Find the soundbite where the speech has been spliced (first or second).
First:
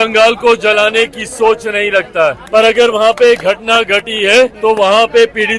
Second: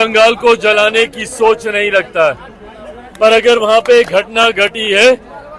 first